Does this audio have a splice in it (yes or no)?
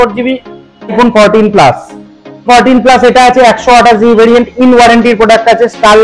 yes